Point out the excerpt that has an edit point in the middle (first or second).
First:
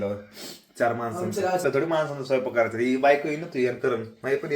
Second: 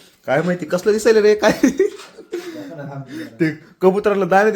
first